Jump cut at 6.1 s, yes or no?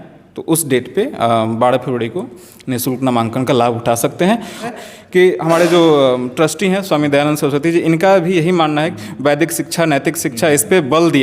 no